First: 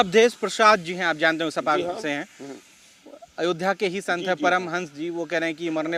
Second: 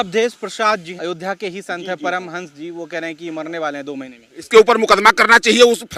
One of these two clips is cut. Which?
second; 2 cuts; at 0.9 s, 4.3 s

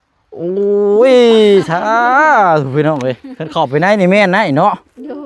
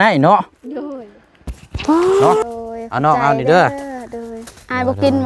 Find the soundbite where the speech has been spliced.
second; 1 cut; at 2.4 s

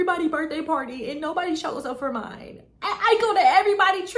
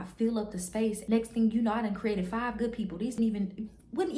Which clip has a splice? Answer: second; 2 cuts; at 1.0 s, 3.2 s

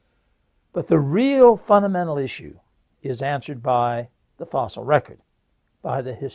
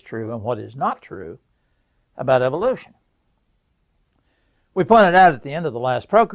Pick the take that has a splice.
second; 1 cut; at 2.7 s

